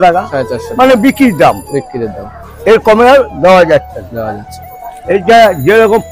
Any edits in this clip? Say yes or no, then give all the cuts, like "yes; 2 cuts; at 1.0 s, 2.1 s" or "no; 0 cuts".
no; 0 cuts